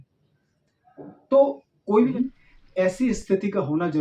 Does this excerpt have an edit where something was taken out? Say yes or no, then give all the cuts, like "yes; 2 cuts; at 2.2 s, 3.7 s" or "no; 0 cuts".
yes; 1 cut; at 2.1 s